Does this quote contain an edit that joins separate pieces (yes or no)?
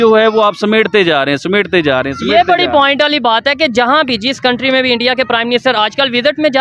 no